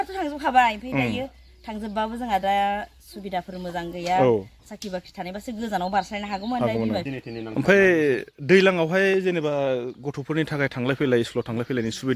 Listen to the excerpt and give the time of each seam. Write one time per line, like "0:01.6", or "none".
0:07.1